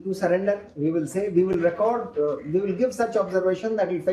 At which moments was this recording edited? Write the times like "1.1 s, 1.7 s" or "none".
none

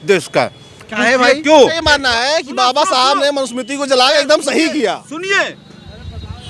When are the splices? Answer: 1.8 s

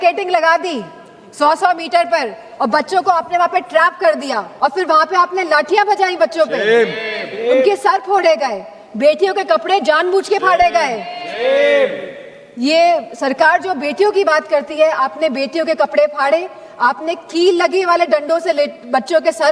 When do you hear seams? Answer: 4.5 s

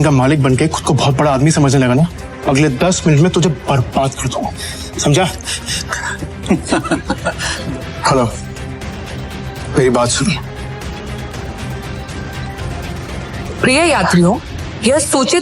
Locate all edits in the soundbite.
2.3 s, 7.5 s, 11.3 s

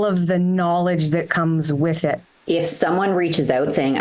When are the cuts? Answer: 2.3 s

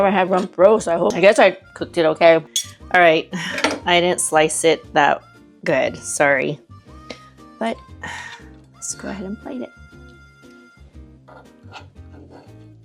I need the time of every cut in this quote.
2.4 s

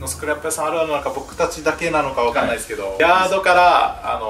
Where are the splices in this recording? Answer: 2.9 s

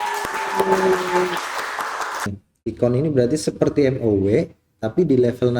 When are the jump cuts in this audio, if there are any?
2.3 s

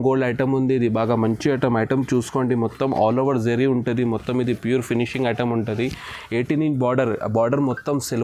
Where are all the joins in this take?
none

